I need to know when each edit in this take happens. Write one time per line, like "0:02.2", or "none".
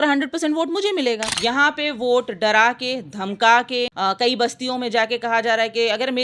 0:01.3
0:03.9